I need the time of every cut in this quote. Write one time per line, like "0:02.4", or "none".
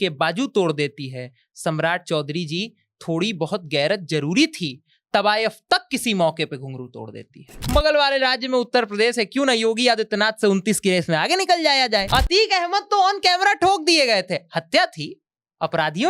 0:07.5
0:12.1